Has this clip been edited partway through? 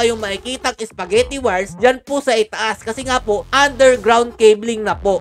no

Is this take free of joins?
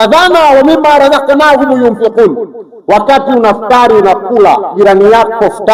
yes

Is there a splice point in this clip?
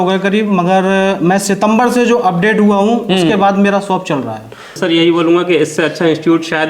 yes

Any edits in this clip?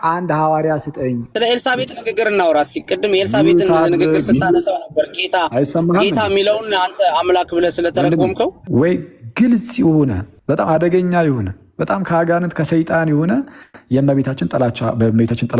yes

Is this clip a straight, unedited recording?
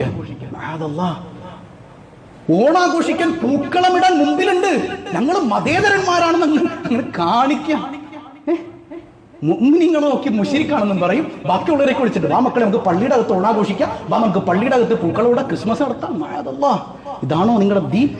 yes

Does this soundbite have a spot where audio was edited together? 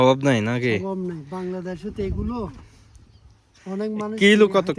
no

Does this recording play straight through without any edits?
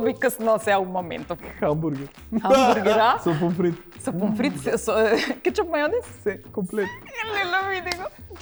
yes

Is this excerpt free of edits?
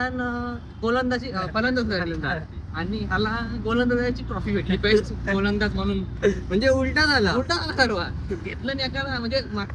yes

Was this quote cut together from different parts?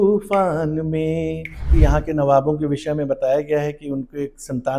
yes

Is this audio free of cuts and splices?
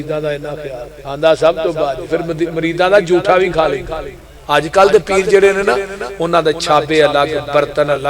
no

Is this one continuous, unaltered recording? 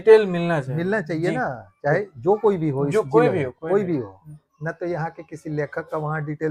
yes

